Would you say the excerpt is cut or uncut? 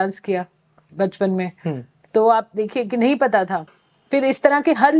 uncut